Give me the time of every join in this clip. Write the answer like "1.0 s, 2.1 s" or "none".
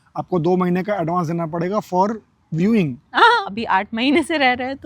3.5 s